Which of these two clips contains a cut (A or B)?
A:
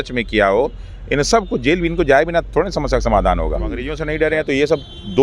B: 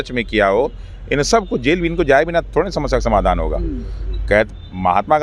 A